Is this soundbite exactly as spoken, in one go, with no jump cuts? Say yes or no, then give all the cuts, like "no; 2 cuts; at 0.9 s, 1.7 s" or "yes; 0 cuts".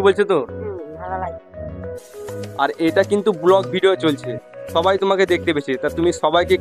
yes; 0 cuts